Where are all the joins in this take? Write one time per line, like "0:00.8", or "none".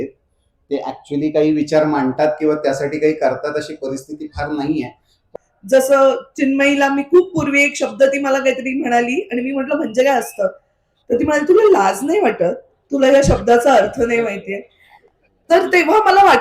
0:05.3